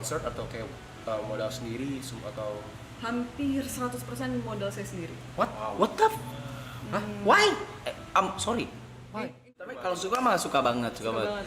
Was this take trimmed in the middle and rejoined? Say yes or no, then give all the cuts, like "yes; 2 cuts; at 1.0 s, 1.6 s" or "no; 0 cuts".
yes; 1 cut; at 9.7 s